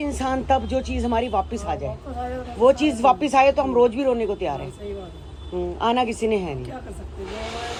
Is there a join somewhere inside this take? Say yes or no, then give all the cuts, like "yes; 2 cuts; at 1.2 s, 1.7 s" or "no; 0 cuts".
no; 0 cuts